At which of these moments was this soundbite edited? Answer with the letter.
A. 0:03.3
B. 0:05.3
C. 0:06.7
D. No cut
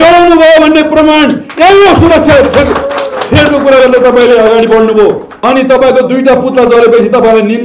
B